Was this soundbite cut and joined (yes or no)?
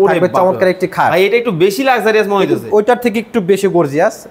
no